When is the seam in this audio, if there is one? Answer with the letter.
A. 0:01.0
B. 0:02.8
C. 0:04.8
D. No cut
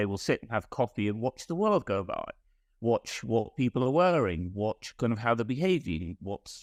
D